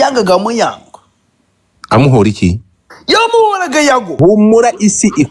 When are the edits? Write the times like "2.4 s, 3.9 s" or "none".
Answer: 4.1 s